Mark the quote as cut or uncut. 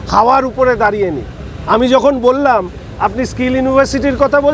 uncut